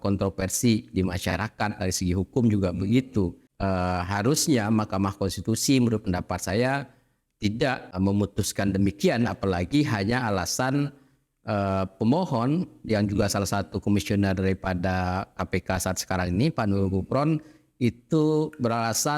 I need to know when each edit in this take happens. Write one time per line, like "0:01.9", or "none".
0:03.5
0:07.9